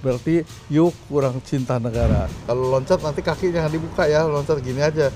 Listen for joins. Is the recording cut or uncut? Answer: cut